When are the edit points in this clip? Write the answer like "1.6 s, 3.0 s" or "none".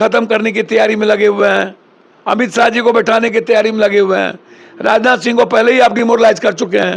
none